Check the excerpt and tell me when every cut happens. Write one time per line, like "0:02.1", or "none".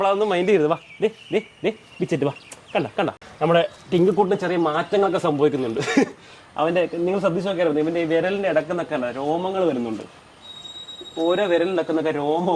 0:03.2